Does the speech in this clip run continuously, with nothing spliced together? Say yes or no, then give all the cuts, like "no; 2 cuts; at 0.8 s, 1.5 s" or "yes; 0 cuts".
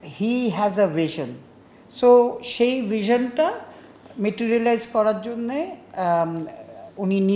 yes; 0 cuts